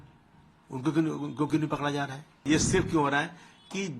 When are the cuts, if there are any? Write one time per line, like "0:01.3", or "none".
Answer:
0:02.4